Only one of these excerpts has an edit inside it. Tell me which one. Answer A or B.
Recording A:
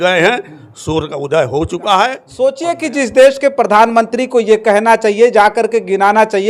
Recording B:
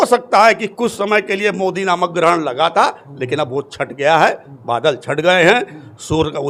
A